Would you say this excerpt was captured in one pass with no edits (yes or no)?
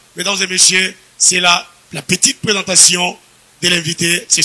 yes